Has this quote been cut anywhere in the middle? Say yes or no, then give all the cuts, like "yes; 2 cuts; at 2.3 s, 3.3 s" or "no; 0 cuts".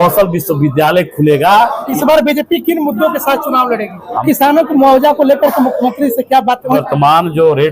yes; 3 cuts; at 1.9 s, 4.2 s, 6.8 s